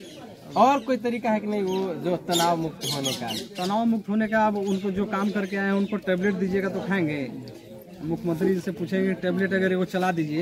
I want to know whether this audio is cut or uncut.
uncut